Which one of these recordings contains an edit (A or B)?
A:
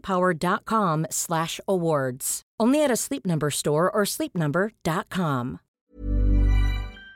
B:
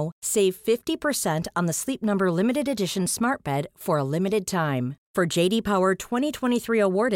A